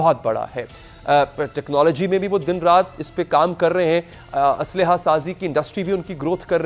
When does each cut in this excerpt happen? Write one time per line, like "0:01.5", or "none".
none